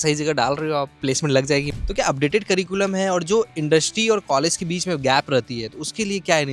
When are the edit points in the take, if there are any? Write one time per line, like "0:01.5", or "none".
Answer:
0:00.9
0:01.7